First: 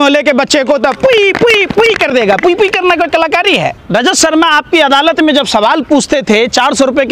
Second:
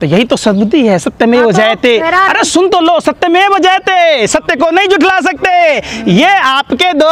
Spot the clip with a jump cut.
first; 1 cut; at 3.8 s

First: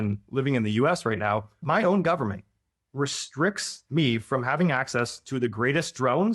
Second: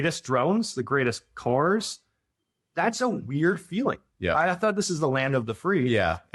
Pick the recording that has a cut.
first; 1 cut; at 1.5 s

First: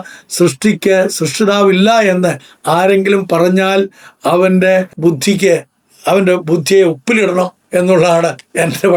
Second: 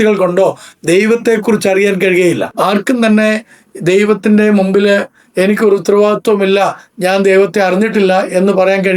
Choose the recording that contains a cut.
second; 1 cut; at 2.5 s

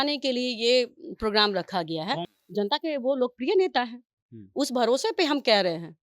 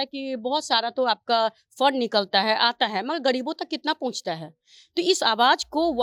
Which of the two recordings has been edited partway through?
first; 1 cut; at 2.4 s

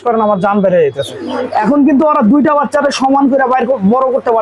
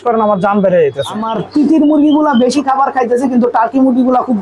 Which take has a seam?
second; 1 cut; at 1.4 s

